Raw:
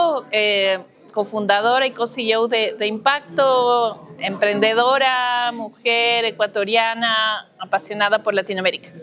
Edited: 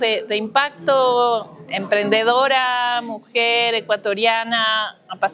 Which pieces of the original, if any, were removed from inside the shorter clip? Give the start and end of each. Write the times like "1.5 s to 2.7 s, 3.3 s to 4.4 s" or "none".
none